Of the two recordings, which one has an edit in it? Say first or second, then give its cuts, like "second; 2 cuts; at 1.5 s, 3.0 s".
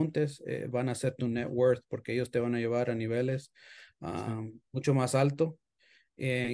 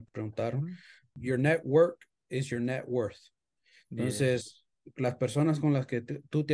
second; 1 cut; at 1.1 s